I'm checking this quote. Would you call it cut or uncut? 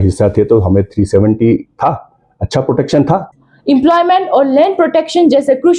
cut